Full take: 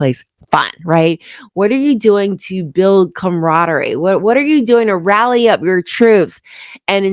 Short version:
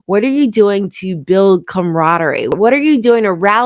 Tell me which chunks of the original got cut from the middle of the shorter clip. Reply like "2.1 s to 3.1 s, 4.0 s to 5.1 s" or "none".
4.0 s to 4.2 s